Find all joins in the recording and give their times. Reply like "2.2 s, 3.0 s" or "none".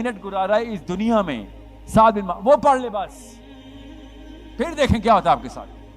none